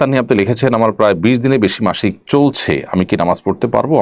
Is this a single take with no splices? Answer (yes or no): yes